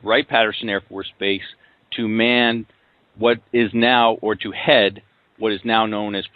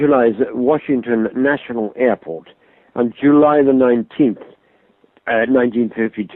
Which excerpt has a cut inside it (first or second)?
first